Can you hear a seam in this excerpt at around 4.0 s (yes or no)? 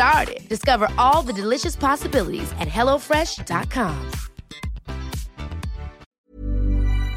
no